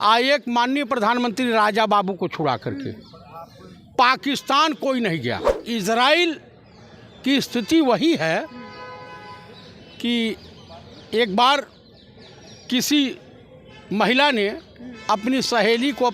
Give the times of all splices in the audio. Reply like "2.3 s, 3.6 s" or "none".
5.6 s